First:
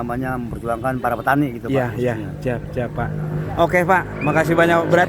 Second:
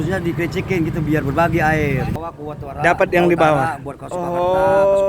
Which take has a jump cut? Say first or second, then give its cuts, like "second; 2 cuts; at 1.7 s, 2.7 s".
second; 1 cut; at 2.1 s